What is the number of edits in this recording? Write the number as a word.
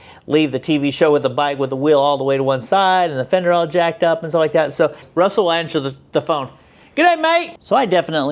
two